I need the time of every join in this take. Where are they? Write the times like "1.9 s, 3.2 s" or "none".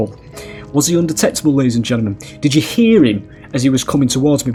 none